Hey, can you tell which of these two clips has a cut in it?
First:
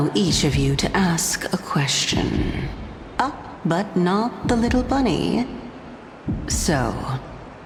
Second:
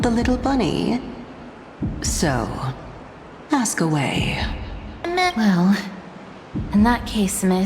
second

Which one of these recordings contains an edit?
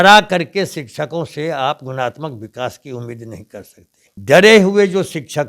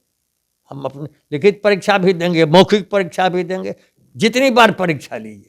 first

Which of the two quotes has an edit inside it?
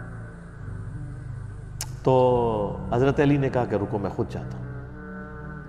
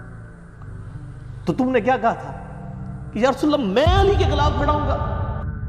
second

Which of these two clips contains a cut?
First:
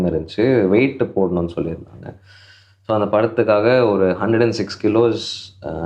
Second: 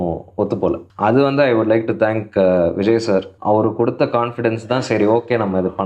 second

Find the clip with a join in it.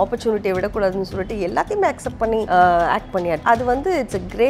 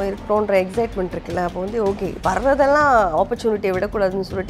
first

